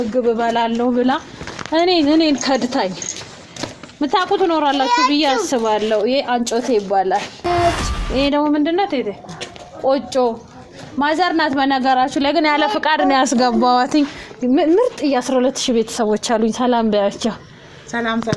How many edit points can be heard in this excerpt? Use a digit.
1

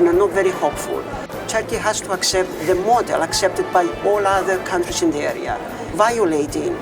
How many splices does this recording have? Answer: 2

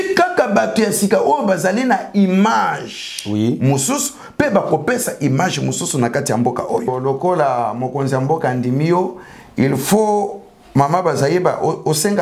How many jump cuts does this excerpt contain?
1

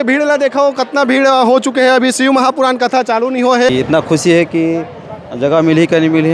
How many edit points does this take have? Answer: 1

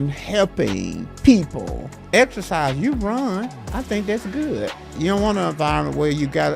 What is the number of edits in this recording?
3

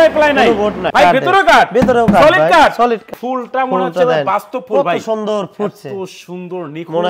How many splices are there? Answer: 2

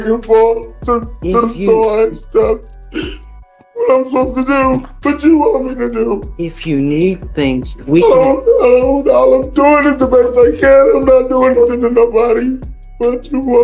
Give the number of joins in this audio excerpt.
0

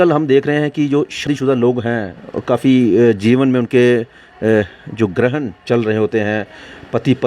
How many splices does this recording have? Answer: 1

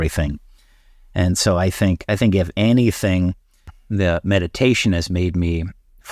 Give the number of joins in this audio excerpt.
1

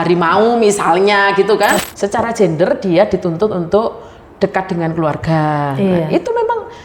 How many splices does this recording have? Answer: 1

